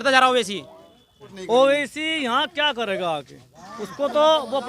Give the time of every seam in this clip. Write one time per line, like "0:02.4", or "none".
0:01.3